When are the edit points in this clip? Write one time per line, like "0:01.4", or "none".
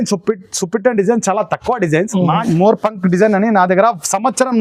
0:02.4